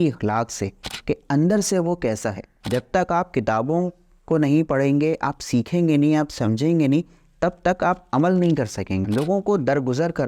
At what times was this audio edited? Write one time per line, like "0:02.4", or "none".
0:02.5
0:09.0